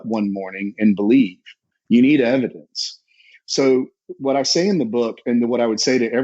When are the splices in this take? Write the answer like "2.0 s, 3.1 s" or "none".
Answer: none